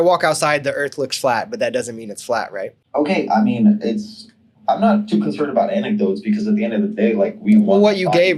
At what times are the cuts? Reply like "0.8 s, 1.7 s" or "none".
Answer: none